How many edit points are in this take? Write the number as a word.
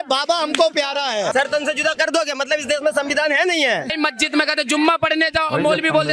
two